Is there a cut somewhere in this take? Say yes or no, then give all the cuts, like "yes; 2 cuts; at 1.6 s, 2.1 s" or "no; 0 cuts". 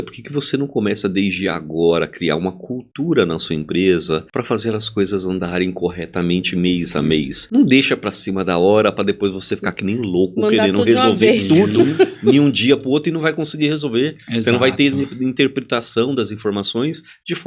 yes; 2 cuts; at 4.3 s, 7.4 s